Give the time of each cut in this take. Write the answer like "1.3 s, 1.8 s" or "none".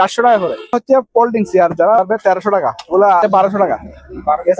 0.7 s, 2.0 s, 3.2 s